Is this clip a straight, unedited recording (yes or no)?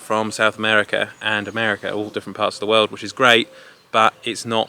yes